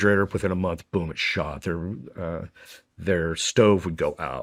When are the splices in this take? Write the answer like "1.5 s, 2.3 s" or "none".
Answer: none